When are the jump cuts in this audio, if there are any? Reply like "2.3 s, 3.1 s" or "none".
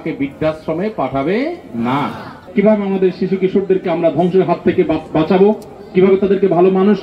2.4 s

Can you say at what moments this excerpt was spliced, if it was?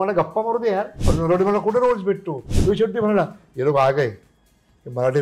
1.0 s, 2.5 s

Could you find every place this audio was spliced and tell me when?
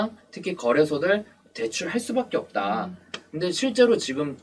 none

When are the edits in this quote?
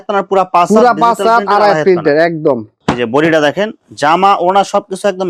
none

